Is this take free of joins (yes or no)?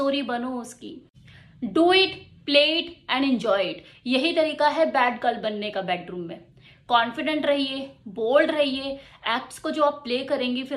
no